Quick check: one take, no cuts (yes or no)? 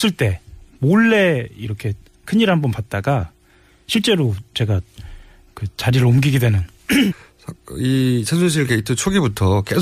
yes